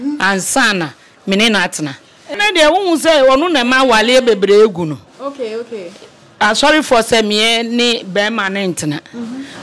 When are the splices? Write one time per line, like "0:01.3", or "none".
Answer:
0:02.4